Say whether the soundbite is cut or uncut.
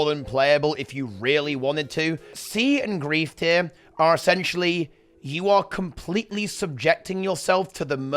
cut